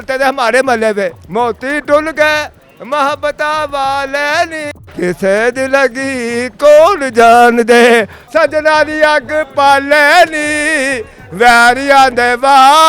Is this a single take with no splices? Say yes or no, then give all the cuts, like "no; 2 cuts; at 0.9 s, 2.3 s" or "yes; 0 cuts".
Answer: no; 2 cuts; at 1.2 s, 8.2 s